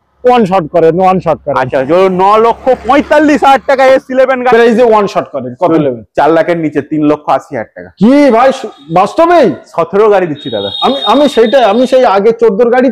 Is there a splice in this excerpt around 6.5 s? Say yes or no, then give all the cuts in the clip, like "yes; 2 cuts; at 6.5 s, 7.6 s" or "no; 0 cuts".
no; 1 cut; at 4.5 s